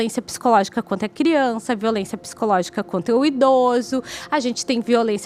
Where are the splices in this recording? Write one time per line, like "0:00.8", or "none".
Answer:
none